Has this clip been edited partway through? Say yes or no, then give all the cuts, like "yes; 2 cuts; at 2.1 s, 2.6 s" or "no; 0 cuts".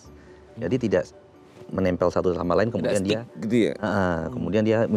no; 0 cuts